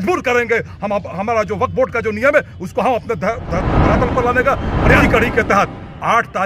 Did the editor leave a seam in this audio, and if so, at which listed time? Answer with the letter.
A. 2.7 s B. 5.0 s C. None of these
B